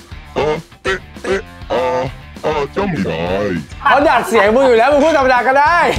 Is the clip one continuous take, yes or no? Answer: no